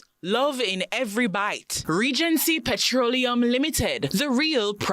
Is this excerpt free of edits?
no; 1 cut; at 1.7 s

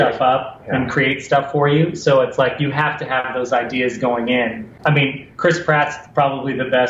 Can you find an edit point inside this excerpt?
yes; 1 cut; at 4.7 s

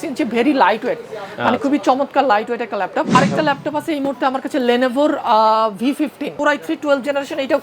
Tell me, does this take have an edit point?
yes; 2 cuts; at 3.1 s, 6.3 s

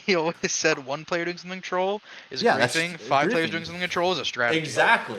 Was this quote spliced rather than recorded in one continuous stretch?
no; 0 cuts

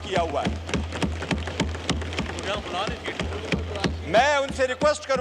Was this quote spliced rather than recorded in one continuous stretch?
no; 0 cuts

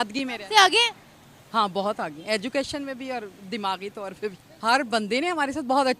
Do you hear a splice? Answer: yes; 1 cut; at 4.4 s

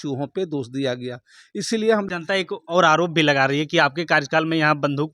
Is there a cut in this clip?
yes; 1 cut; at 2.1 s

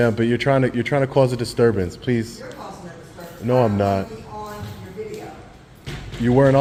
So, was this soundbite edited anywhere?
no; 0 cuts

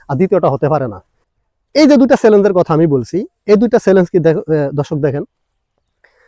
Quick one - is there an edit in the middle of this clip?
yes; 1 cut; at 1.3 s

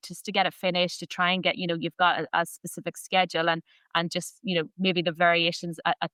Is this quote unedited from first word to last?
yes; 0 cuts

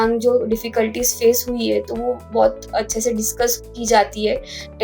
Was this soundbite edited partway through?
yes; 1 cut; at 2.2 s

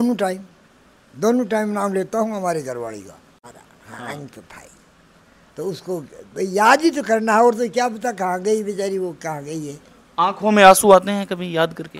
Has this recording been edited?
yes; 1 cut; at 3.5 s

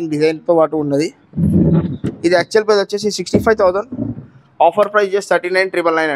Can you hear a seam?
no; 0 cuts

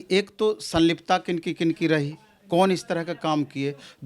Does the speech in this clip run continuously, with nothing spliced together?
yes; 0 cuts

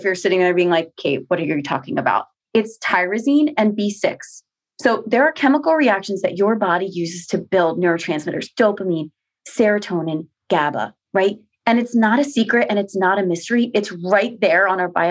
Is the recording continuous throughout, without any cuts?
no; 1 cut; at 2.3 s

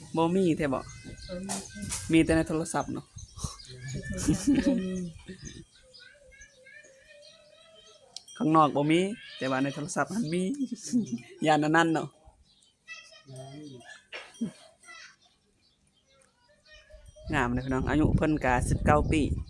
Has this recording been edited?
no; 0 cuts

